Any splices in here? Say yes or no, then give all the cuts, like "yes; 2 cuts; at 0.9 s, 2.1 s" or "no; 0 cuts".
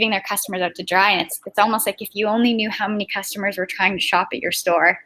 no; 0 cuts